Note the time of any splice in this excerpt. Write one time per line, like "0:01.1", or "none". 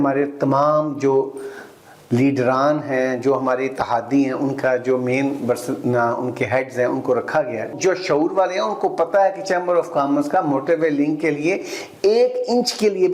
0:07.7